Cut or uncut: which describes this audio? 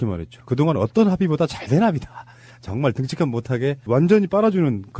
uncut